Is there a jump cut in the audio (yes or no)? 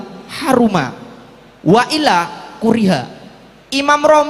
no